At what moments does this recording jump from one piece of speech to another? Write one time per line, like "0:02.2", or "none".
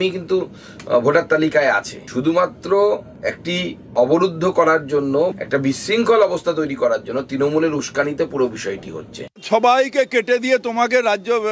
0:09.4